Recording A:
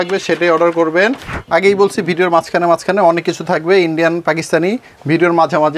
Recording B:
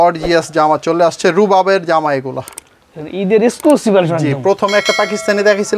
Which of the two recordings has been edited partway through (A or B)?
A